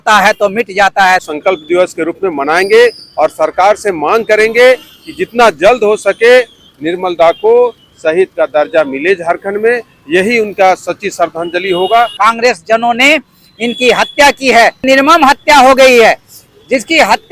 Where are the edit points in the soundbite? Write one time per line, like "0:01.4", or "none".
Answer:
0:01.2
0:12.1
0:14.8